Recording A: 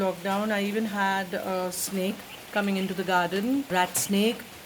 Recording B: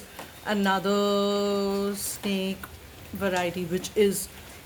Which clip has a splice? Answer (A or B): A